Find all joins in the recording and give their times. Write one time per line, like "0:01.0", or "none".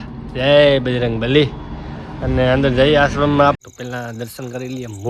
0:03.6